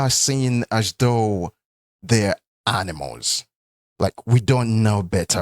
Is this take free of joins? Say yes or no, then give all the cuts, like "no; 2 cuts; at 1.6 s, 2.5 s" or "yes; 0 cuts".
yes; 0 cuts